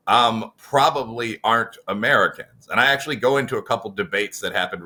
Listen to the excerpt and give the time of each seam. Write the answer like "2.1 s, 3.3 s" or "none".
none

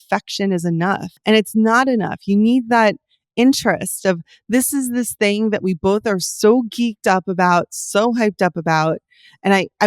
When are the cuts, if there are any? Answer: 1.1 s

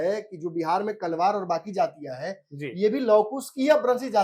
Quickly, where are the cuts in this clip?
none

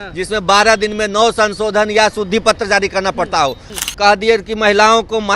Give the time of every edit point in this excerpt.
3.7 s

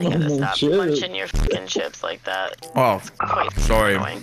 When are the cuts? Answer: none

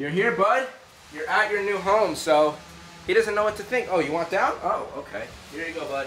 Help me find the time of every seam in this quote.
none

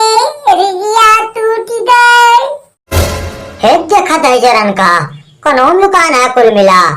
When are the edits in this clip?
3.0 s

